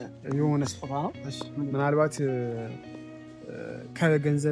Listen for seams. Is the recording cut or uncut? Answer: uncut